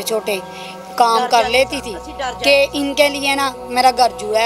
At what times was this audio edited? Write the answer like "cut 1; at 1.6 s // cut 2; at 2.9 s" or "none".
none